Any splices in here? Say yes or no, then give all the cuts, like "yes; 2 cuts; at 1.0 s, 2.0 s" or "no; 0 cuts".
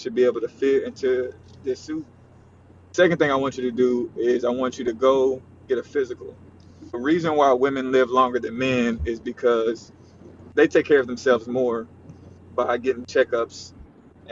no; 0 cuts